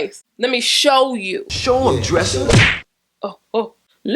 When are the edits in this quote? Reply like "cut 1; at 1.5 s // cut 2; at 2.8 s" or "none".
cut 1; at 2.7 s